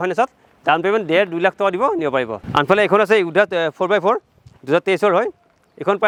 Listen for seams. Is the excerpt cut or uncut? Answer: uncut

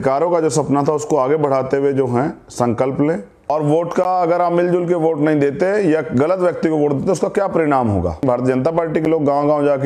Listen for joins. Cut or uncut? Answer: cut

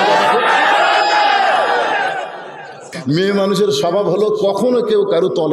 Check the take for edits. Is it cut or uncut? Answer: cut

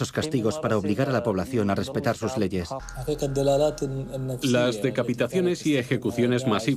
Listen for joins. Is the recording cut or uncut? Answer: cut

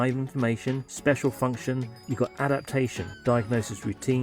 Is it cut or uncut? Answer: cut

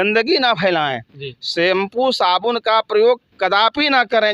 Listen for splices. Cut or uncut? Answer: uncut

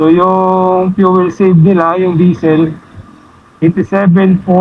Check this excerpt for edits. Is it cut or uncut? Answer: uncut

